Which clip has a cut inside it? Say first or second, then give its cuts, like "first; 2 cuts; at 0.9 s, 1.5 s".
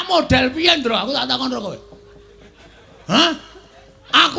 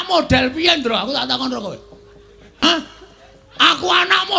second; 1 cut; at 2.6 s